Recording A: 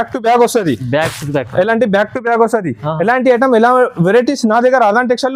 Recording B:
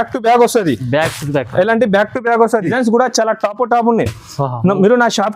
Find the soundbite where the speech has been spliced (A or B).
B